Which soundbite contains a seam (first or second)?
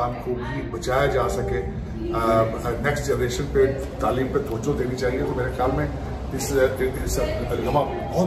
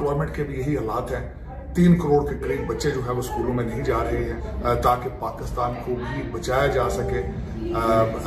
second